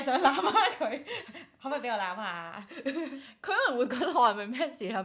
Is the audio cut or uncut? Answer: uncut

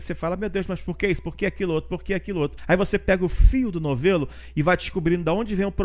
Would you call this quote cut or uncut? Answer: cut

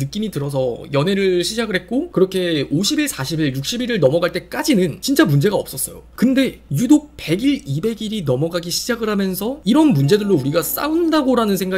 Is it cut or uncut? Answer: cut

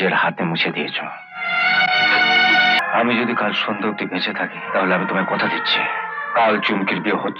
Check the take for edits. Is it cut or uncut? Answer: cut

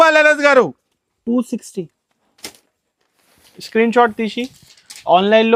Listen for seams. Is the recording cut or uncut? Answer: uncut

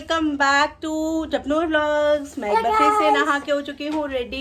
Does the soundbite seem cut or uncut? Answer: uncut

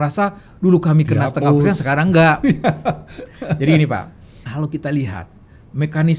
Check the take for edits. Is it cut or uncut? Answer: cut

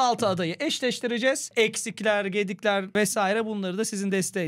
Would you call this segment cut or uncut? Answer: uncut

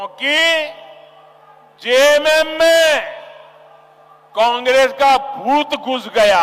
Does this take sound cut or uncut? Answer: uncut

